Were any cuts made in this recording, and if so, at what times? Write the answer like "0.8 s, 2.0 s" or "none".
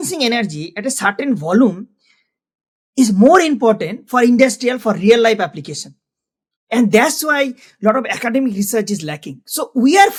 none